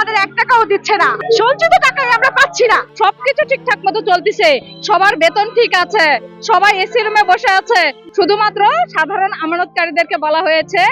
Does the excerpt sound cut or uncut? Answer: cut